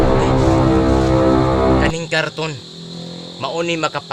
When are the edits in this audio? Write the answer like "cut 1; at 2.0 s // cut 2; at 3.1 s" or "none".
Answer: cut 1; at 1.9 s